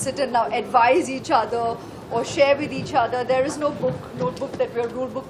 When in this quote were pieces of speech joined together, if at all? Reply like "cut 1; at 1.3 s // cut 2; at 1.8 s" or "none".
none